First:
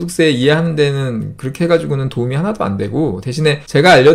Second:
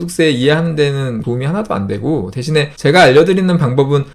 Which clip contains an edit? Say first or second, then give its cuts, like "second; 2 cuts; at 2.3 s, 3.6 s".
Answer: second; 1 cut; at 1.2 s